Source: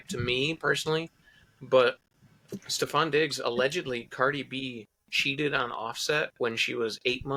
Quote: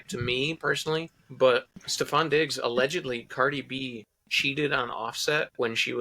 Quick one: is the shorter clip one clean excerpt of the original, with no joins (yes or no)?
no